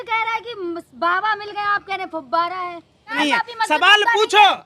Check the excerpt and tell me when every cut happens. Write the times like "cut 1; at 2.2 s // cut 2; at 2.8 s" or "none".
cut 1; at 3.2 s

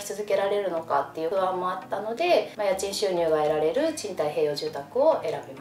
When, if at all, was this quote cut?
none

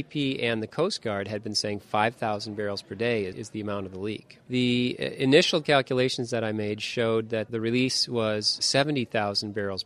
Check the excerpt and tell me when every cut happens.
cut 1; at 4.4 s // cut 2; at 7.5 s // cut 3; at 8.6 s

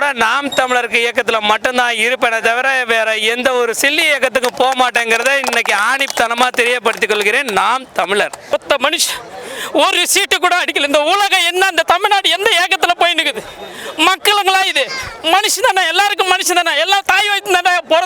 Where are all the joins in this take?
cut 1; at 8.5 s

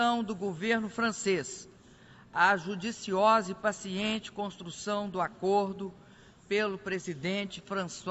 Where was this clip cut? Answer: cut 1; at 4.7 s

